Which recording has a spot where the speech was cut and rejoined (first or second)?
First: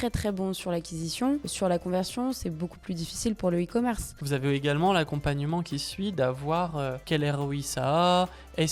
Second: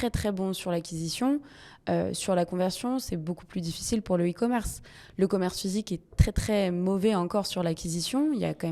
first